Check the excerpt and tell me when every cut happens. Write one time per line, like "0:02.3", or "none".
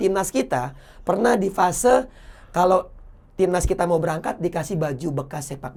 none